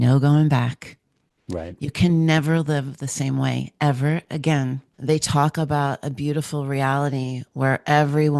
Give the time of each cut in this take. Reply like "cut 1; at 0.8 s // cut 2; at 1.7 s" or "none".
cut 1; at 4.9 s